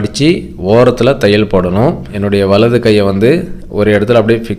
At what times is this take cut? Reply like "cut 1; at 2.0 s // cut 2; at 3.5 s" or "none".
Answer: cut 1; at 2.1 s